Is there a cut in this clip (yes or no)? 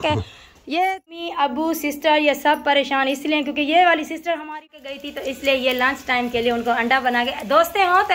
yes